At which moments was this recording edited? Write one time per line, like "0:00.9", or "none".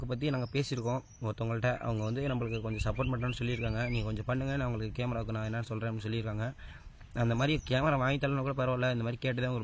none